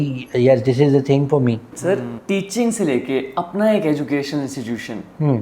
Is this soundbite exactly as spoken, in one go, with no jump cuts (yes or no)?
no